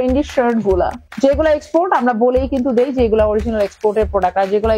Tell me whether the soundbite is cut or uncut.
cut